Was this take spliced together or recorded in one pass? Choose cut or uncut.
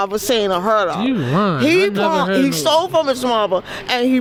uncut